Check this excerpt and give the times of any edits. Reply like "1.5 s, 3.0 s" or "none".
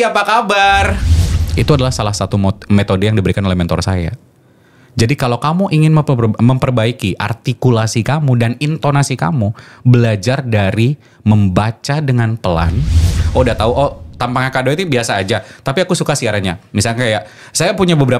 1.2 s, 13.2 s